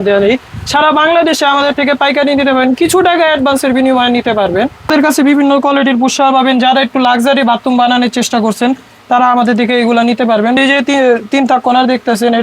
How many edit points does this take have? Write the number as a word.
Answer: one